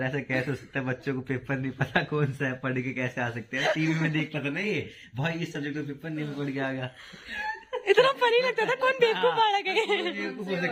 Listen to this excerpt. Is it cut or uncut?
uncut